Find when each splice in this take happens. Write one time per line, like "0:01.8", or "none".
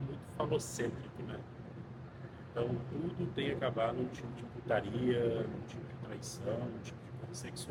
none